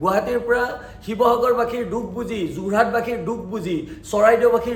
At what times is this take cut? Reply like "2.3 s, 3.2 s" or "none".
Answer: none